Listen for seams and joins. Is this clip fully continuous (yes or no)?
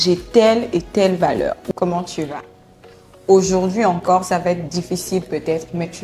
no